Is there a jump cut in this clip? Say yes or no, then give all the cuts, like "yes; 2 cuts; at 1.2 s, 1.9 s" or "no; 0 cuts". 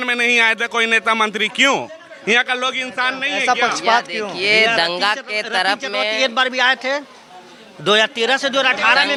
no; 0 cuts